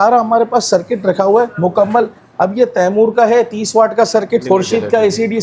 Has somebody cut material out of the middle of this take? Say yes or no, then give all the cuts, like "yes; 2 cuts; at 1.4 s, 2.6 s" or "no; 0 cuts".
yes; 2 cuts; at 1.5 s, 4.4 s